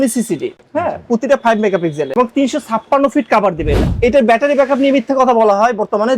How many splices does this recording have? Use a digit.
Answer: 1